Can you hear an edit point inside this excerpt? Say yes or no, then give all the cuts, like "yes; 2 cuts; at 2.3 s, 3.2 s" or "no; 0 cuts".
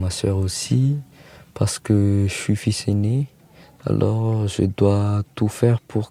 no; 0 cuts